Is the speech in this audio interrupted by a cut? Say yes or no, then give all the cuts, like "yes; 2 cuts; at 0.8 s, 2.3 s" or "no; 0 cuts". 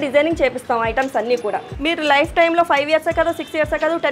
yes; 1 cut; at 1.7 s